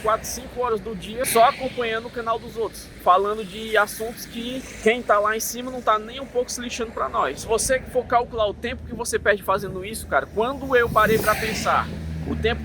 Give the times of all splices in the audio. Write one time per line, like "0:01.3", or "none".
0:01.3
0:02.9
0:04.7
0:07.4